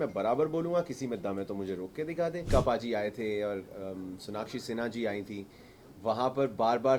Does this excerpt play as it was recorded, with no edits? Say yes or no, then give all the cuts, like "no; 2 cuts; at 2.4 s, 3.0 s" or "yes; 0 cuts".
no; 1 cut; at 2.4 s